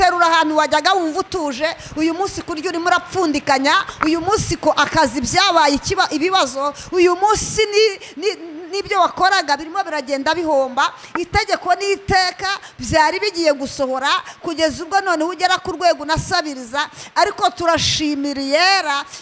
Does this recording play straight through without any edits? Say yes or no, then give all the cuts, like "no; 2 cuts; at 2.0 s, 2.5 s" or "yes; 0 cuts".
yes; 0 cuts